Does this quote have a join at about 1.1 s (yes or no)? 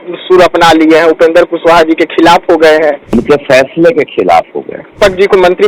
no